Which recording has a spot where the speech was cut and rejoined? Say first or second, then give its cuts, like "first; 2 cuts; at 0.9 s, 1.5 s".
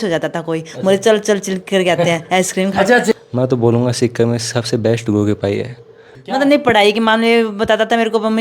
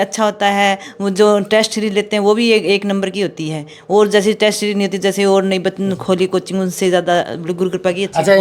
first; 2 cuts; at 3.1 s, 6.1 s